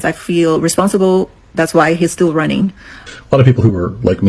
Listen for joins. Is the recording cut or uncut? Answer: cut